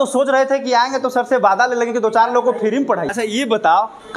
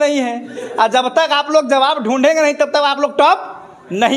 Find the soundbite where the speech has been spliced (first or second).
first